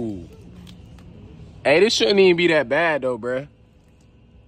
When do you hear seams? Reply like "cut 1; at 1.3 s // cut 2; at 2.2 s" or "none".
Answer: cut 1; at 1.1 s

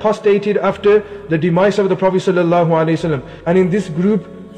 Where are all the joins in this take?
cut 1; at 3.2 s

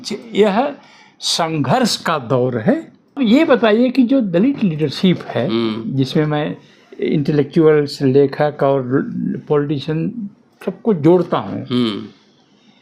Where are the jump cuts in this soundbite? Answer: cut 1; at 3.2 s

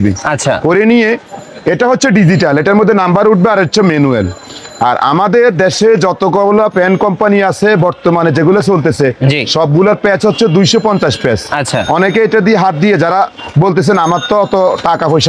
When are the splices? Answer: none

